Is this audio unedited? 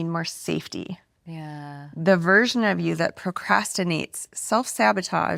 yes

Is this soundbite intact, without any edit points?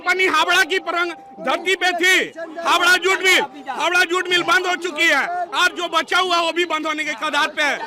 yes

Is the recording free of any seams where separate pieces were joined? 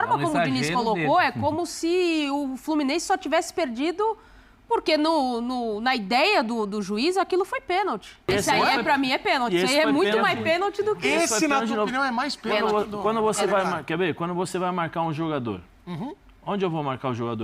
no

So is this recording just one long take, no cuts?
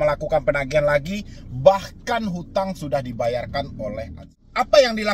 no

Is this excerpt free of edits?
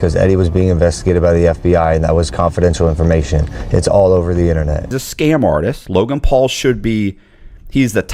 no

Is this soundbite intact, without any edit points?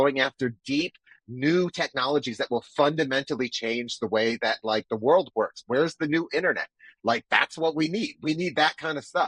yes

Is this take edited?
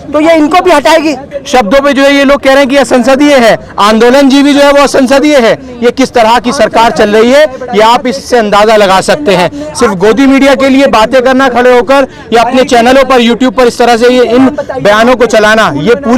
yes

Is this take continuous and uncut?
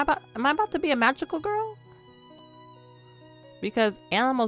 yes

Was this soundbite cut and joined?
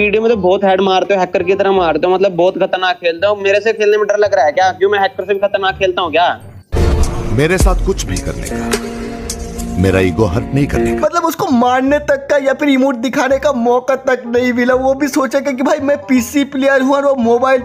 yes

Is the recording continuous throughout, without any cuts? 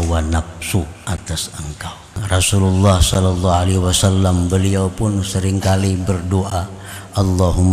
no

